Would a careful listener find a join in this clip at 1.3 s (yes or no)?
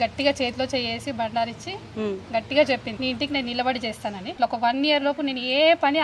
no